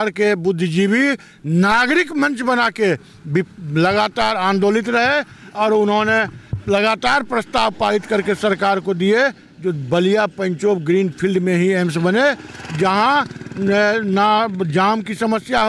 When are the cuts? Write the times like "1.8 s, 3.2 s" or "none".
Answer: none